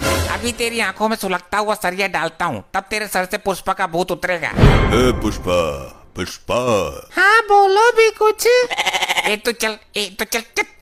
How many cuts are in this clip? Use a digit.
0